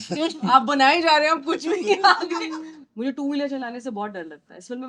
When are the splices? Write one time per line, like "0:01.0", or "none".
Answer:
0:02.7